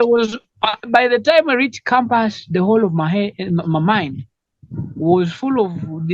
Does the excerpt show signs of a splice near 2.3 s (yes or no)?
no